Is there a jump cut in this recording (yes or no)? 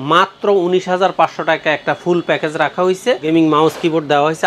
yes